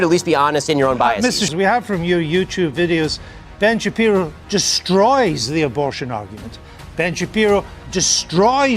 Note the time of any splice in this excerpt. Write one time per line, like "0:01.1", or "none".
0:01.5